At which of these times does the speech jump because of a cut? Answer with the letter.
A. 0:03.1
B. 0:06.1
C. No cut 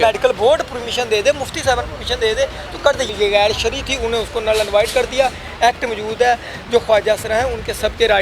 A